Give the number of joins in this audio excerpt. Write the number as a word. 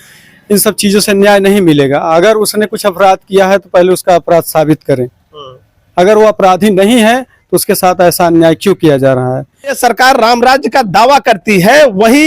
one